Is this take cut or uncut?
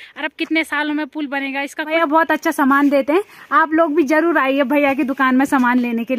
cut